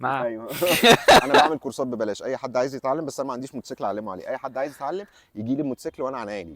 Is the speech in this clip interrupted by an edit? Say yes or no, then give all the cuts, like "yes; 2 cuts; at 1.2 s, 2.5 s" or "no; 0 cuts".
no; 0 cuts